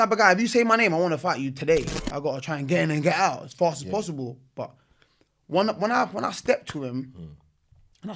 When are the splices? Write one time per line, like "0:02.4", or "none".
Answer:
0:02.0